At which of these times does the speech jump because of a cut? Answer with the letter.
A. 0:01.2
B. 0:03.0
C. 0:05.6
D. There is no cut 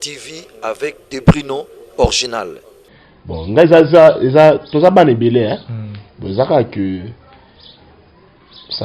B